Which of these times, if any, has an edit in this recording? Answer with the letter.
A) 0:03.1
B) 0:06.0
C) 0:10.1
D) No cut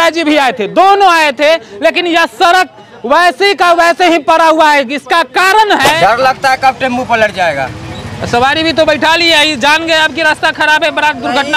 B